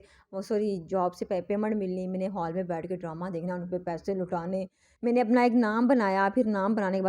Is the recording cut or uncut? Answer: cut